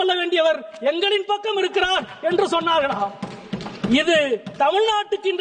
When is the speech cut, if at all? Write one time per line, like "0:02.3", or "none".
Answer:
none